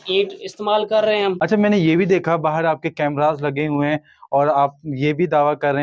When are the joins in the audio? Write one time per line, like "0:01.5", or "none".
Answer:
0:01.4